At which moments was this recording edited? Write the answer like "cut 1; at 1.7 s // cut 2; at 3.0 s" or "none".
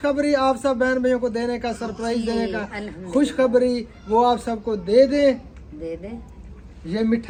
none

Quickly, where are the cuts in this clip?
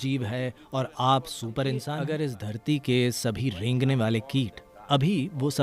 cut 1; at 2.0 s

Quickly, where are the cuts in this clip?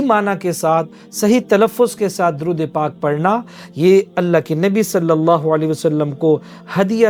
none

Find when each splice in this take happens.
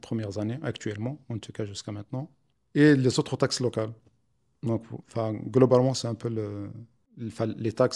none

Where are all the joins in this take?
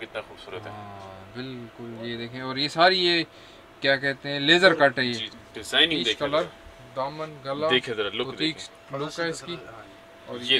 cut 1; at 5.2 s

